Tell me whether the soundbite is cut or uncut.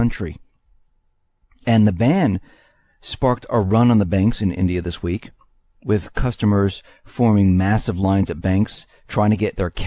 cut